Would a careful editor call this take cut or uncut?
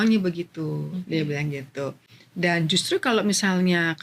uncut